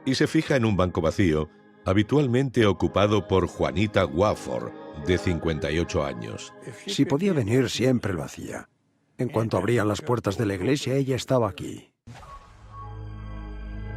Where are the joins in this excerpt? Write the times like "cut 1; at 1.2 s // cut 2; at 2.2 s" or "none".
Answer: cut 1; at 7.8 s